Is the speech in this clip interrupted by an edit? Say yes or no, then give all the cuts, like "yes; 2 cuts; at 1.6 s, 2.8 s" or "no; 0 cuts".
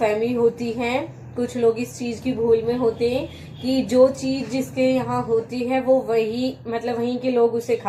no; 0 cuts